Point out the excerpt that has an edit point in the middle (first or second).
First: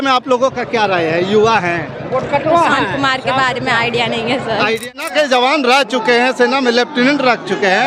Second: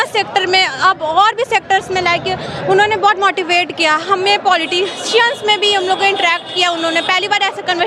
first